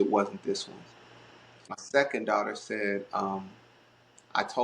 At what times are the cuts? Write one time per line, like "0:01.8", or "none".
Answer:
0:01.6